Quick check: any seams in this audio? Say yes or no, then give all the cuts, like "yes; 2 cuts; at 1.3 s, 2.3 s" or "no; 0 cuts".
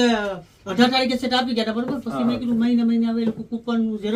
no; 0 cuts